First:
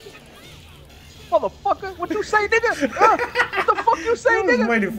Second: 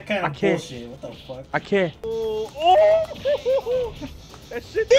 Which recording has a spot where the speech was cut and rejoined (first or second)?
second